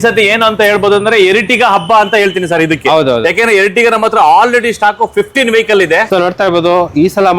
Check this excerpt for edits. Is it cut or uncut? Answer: cut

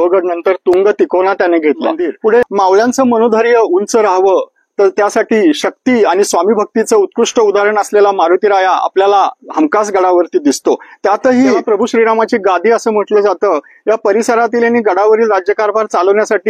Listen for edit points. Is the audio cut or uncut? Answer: cut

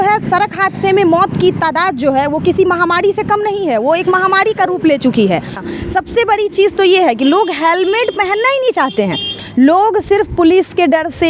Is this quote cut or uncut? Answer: cut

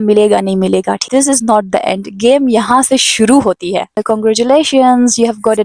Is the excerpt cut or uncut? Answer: cut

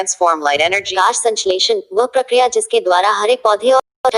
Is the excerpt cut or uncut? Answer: cut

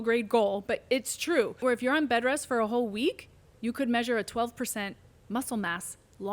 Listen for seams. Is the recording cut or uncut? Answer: cut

